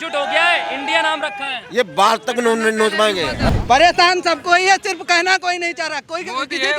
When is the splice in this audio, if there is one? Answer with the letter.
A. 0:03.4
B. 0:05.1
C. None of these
A